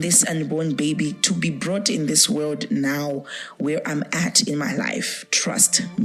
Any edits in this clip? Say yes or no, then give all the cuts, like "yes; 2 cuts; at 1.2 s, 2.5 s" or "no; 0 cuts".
no; 0 cuts